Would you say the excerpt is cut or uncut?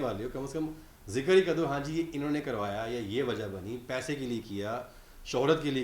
uncut